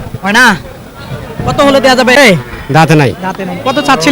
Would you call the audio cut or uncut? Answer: cut